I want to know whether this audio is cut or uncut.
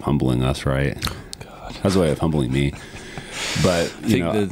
uncut